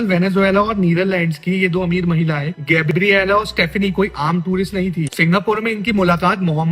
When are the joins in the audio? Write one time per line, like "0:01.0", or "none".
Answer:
none

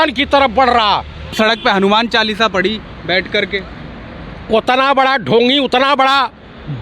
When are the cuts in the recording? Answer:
0:01.4

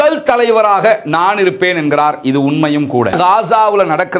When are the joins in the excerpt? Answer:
0:03.1

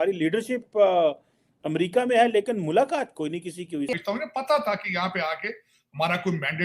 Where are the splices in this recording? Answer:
0:03.9

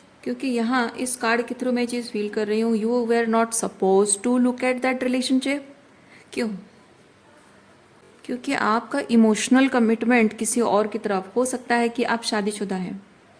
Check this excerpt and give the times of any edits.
0:08.0

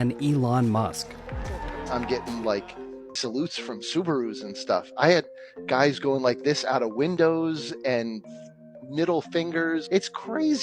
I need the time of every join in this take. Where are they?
0:03.1

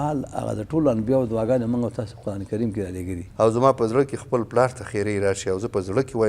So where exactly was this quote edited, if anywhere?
0:03.2

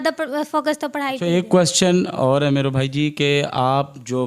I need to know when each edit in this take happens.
0:01.2

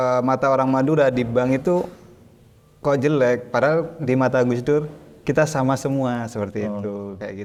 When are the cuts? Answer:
none

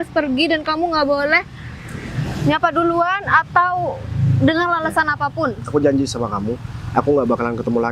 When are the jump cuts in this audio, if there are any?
none

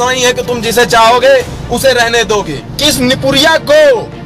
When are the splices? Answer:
0:02.6

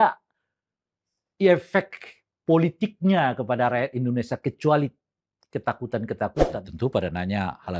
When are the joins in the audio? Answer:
0:06.4

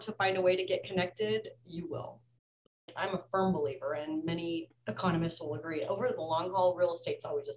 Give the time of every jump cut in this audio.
0:02.9
0:04.7

